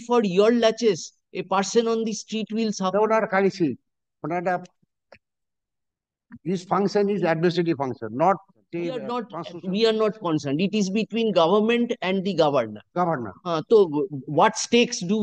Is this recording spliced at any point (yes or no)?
yes